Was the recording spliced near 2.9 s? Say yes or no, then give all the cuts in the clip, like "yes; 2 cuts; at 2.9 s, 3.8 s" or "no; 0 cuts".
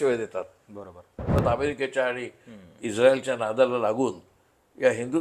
no; 1 cut; at 1.3 s